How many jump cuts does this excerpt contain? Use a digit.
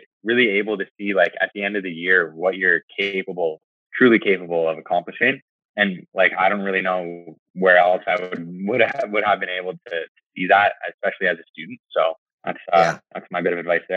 1